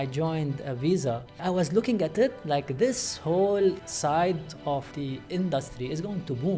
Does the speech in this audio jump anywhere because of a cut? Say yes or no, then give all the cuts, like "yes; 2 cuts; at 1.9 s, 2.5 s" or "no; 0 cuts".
yes; 3 cuts; at 1.4 s, 3.8 s, 4.9 s